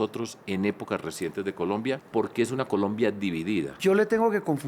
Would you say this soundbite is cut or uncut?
cut